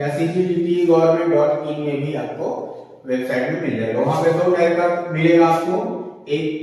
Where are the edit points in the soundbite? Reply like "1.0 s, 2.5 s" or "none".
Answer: none